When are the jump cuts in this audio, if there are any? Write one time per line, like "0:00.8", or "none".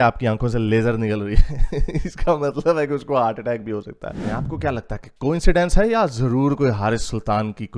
0:04.2